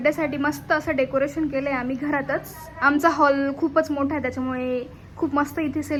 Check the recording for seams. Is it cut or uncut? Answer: uncut